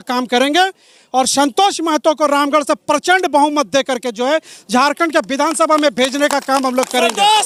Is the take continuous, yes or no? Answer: yes